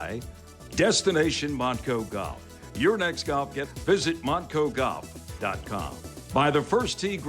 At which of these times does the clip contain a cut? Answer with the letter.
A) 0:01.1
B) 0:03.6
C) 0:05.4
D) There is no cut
B